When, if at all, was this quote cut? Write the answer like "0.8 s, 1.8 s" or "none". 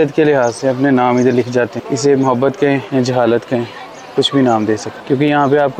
1.8 s, 2.9 s, 4.9 s